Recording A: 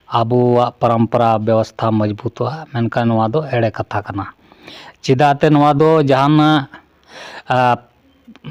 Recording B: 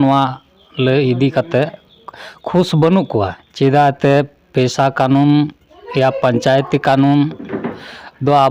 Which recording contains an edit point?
B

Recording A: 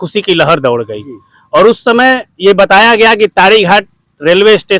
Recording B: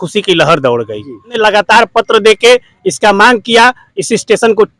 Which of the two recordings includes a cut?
B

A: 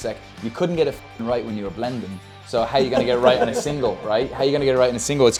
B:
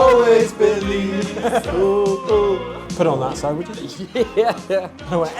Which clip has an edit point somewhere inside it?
B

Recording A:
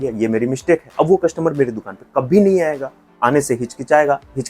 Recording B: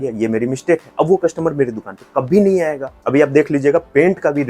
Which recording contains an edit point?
B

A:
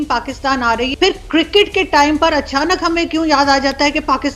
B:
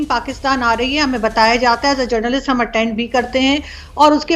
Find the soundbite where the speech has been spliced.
A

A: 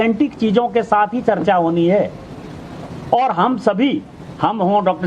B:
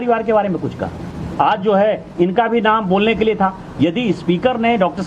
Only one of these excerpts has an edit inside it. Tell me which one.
A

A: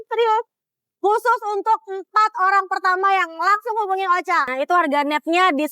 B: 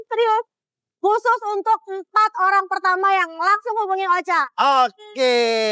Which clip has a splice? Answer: A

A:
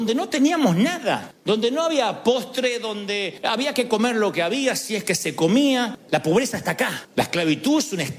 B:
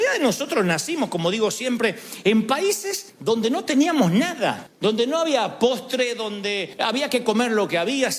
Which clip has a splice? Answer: A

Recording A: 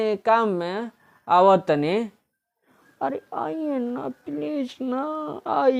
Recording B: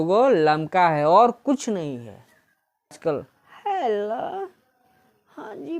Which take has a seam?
B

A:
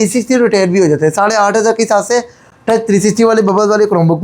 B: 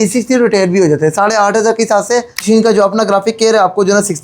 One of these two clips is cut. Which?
B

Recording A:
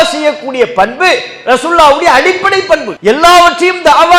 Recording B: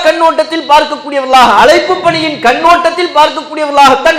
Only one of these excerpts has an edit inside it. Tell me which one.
A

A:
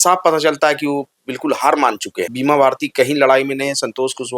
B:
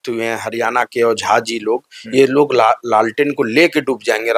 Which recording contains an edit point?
A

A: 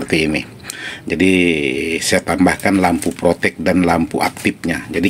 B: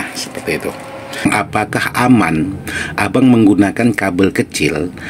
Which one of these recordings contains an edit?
B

